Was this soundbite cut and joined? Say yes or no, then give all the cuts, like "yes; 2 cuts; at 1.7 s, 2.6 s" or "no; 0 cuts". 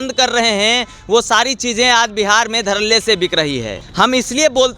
yes; 1 cut; at 3.8 s